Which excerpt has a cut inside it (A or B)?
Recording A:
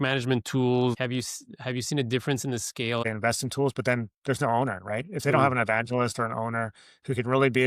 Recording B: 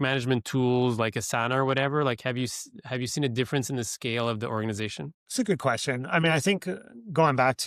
A